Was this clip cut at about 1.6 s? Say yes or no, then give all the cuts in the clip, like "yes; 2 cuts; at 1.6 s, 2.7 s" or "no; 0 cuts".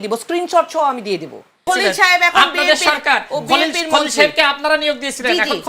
yes; 1 cut; at 1.6 s